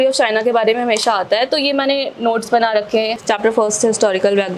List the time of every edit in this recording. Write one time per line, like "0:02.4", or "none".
0:03.2